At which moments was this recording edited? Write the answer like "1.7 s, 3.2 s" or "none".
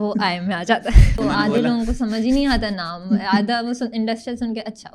1.2 s